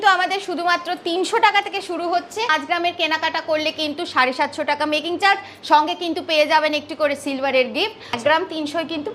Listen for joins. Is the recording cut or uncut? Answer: cut